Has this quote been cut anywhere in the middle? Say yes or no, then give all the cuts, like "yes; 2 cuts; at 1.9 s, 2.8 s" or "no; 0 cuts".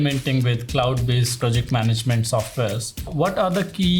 yes; 2 cuts; at 1.4 s, 3.1 s